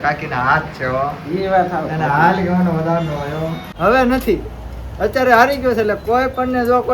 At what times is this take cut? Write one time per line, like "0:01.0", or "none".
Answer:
0:03.6